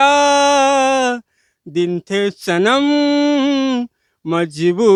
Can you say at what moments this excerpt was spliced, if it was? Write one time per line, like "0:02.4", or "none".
none